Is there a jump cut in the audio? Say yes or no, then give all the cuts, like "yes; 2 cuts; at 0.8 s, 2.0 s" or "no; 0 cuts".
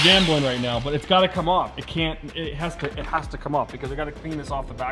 no; 0 cuts